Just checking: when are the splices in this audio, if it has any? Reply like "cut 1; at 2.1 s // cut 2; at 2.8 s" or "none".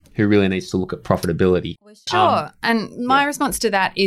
cut 1; at 1.8 s